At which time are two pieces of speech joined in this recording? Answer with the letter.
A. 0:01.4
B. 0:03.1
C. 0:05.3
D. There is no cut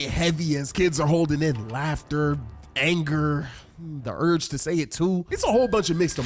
C